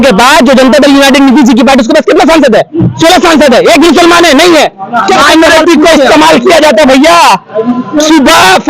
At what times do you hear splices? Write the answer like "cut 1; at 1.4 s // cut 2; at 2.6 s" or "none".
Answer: cut 1; at 5.2 s